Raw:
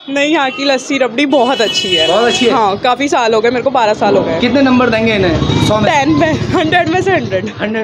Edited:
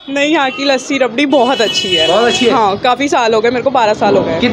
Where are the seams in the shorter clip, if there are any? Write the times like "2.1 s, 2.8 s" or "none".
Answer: none